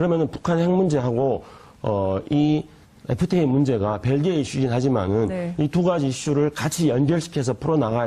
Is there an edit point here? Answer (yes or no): yes